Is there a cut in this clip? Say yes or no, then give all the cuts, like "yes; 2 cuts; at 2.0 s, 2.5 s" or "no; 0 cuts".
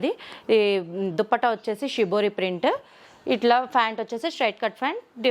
no; 0 cuts